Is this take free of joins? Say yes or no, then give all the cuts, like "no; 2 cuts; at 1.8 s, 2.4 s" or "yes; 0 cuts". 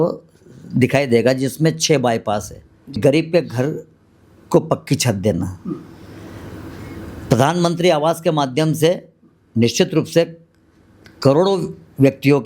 no; 1 cut; at 3.0 s